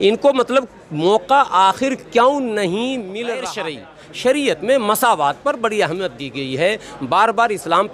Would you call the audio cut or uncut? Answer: cut